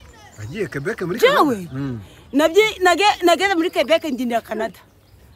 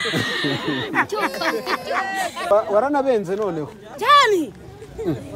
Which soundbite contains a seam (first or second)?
second